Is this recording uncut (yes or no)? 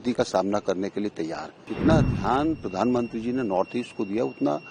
no